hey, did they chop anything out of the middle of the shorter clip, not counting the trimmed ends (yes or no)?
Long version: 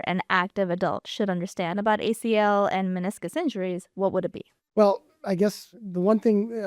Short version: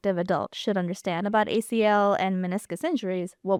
no